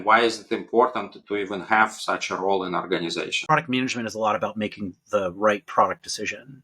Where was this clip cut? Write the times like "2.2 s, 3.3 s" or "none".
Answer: 3.4 s